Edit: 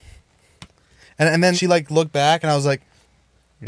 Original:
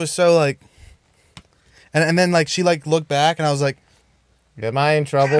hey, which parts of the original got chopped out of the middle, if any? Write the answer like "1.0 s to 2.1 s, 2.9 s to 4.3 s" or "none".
2.3 s to 2.5 s